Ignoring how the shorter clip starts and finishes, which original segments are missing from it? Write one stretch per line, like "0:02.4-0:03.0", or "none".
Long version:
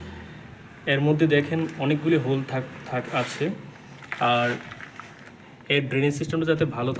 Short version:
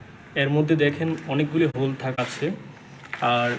0:02.5-0:03.0